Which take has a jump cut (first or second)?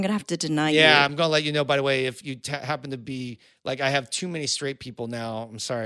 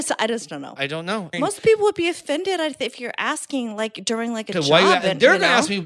second